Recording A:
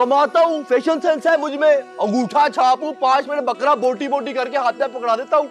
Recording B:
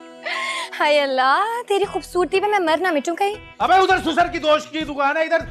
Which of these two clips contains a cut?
B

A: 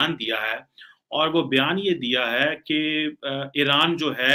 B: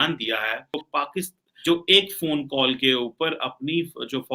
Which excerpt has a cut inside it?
B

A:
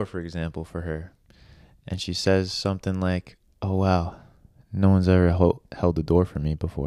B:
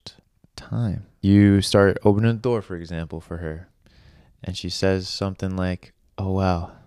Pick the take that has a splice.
B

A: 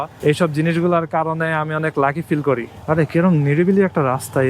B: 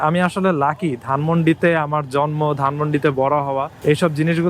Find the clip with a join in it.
A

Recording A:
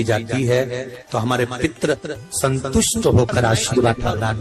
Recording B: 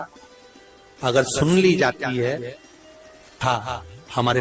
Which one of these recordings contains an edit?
B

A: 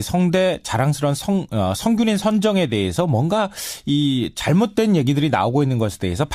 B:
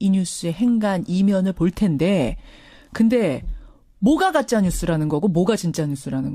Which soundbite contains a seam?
B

